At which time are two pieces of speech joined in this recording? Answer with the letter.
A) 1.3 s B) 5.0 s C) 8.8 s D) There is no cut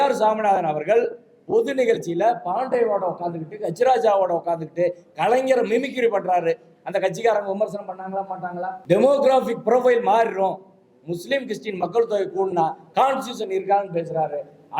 C